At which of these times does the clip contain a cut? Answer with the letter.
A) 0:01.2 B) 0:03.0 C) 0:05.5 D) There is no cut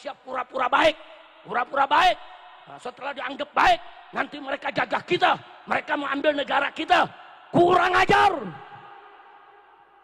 D